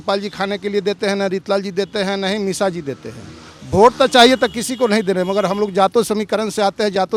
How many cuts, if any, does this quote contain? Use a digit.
0